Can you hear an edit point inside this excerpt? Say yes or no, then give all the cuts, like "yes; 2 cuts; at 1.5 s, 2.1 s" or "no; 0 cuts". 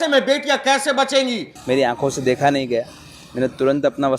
yes; 1 cut; at 1.5 s